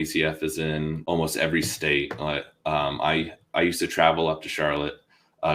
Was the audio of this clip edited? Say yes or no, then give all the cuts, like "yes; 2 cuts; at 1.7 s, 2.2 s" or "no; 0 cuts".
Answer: yes; 1 cut; at 1.0 s